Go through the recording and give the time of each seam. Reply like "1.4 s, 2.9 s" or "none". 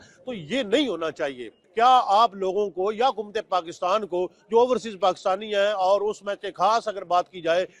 1.6 s